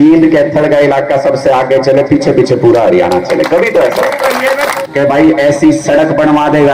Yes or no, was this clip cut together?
yes